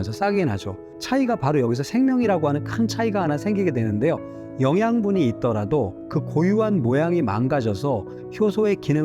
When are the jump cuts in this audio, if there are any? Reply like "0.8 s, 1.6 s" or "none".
0.9 s